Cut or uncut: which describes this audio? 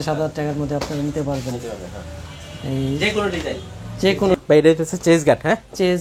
cut